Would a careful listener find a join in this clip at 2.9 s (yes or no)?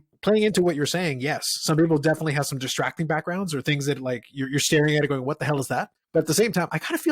no